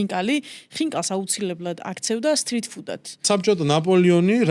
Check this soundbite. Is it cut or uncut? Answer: cut